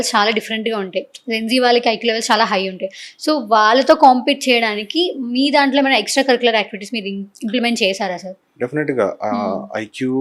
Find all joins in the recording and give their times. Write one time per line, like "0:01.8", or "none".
none

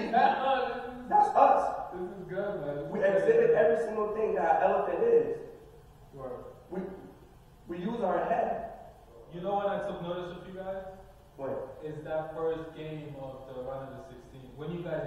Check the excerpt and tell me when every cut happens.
0:09.3

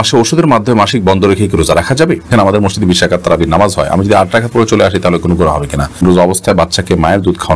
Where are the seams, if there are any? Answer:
0:02.4
0:06.0

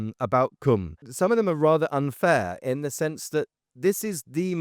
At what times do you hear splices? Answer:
0:01.0

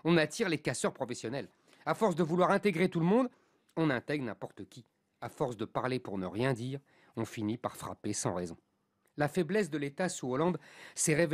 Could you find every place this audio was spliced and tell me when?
0:09.0

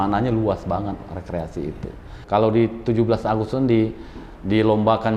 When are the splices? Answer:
0:02.1

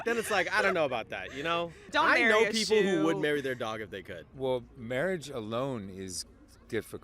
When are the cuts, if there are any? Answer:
0:01.9
0:04.2

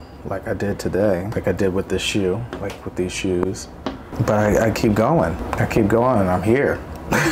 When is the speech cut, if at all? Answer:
0:01.3
0:04.1
0:05.4

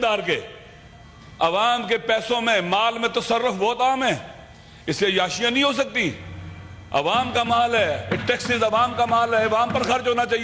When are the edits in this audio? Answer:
none

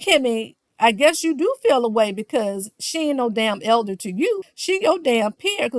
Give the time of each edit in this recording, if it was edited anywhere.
none

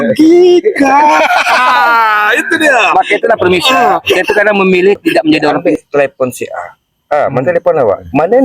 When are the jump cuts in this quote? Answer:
0:05.7

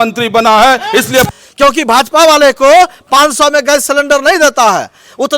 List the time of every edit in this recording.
0:01.3

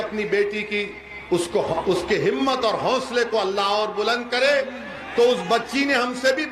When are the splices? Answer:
none

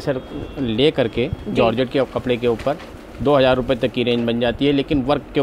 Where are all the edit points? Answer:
none

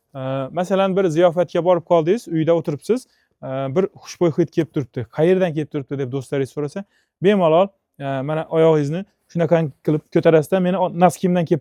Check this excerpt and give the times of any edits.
none

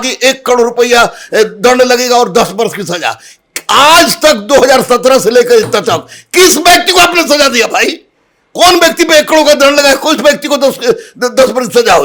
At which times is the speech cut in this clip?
none

